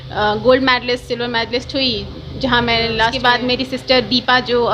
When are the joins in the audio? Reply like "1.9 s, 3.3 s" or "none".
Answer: 3.2 s